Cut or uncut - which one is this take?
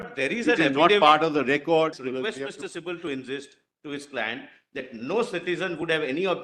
cut